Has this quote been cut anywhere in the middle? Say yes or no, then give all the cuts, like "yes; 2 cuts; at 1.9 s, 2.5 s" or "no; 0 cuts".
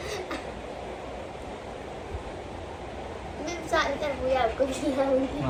no; 0 cuts